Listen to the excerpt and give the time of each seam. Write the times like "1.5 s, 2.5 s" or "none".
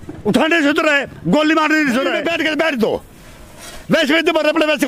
2.2 s